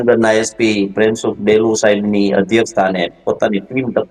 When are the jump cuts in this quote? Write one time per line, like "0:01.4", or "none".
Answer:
none